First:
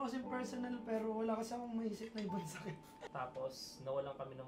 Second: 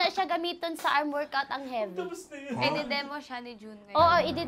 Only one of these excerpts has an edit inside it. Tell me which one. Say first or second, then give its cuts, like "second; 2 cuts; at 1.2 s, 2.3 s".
first; 1 cut; at 3.0 s